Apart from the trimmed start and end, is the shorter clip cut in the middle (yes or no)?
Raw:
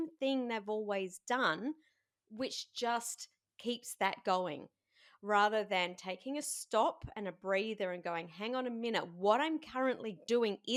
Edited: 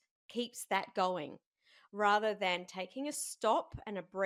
no